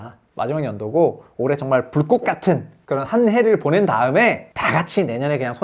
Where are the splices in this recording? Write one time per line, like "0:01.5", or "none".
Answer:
0:02.8
0:04.5

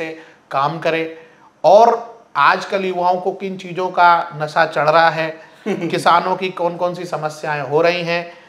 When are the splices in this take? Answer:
none

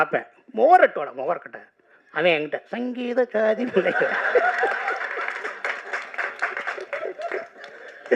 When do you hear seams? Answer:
none

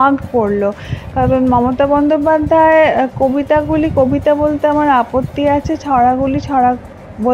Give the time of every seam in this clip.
none

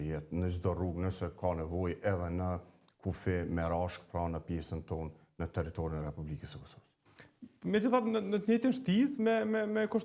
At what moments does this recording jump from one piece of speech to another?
none

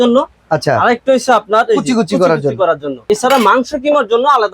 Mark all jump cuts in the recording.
0:03.0

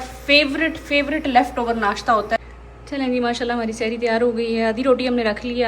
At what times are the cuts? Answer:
0:02.5

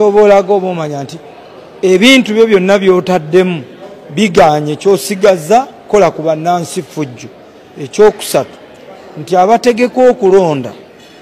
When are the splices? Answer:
none

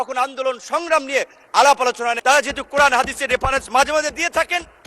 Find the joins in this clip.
0:02.2

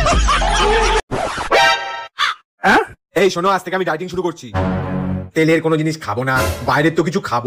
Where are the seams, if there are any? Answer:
0:01.0

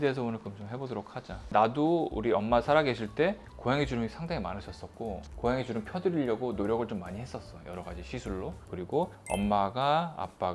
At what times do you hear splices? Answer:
0:08.6

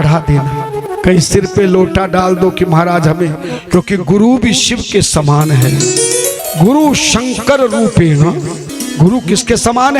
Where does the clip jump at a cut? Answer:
0:00.9
0:06.4
0:08.7

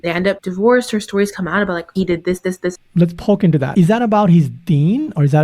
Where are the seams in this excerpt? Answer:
0:02.8
0:03.7

